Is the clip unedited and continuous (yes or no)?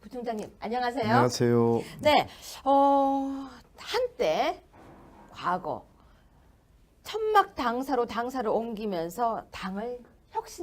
yes